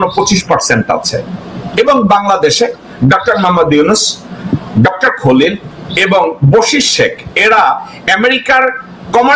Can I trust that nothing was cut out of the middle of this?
yes; 0 cuts

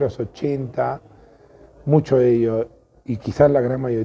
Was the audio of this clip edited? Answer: no; 0 cuts

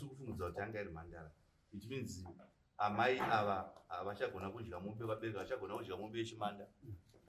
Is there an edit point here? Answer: no; 0 cuts

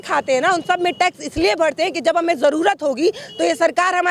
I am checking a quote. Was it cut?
no; 0 cuts

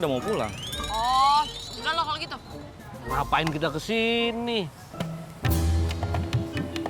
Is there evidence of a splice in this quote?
no; 0 cuts

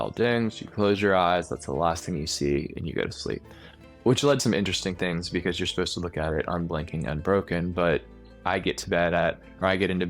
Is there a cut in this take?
no; 0 cuts

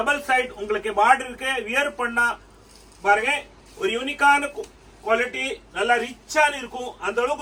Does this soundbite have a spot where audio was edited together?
no; 0 cuts

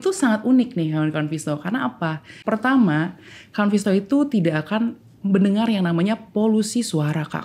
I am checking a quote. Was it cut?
yes; 1 cut; at 2.4 s

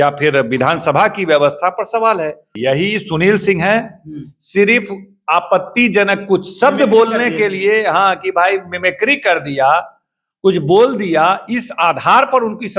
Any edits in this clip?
yes; 1 cut; at 2.5 s

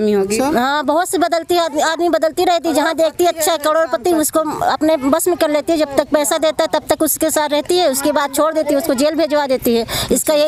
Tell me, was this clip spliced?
no; 0 cuts

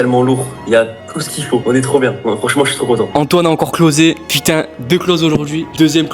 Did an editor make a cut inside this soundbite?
yes; 2 cuts; at 3.1 s, 4.3 s

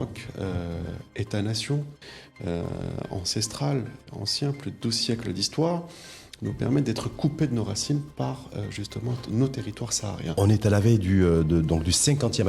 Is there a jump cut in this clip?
yes; 1 cut; at 10.4 s

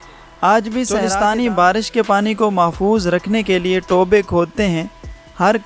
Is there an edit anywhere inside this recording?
yes; 1 cut; at 1.0 s

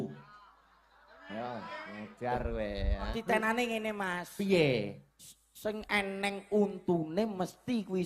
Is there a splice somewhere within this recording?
yes; 1 cut; at 3.1 s

